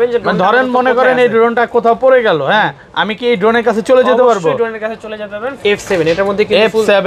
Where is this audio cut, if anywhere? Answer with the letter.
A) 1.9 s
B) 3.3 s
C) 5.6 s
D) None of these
C